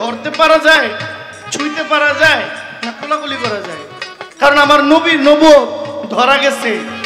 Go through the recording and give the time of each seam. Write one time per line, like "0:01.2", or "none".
none